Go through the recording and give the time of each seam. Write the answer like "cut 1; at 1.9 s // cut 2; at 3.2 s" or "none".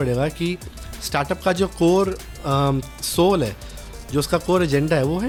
none